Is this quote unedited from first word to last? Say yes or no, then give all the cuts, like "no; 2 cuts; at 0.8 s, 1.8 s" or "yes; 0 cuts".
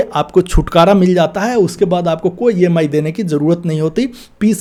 yes; 0 cuts